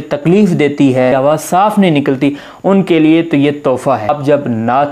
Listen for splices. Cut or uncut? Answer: cut